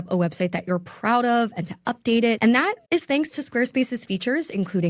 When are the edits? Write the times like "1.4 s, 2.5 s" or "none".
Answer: none